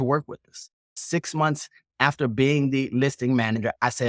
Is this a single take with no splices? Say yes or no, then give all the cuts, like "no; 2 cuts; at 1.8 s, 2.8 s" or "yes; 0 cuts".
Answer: no; 1 cut; at 1.0 s